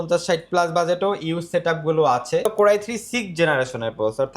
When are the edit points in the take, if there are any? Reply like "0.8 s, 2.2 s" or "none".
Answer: 2.5 s